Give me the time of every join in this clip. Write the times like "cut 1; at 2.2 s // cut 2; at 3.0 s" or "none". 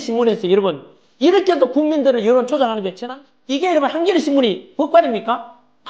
cut 1; at 3.2 s